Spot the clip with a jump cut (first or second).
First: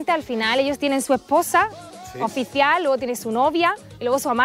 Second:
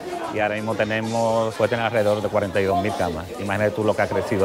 second